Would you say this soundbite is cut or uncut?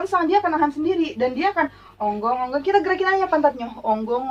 uncut